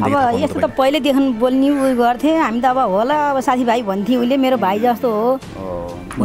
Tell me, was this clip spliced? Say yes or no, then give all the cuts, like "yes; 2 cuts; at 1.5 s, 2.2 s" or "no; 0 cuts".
no; 0 cuts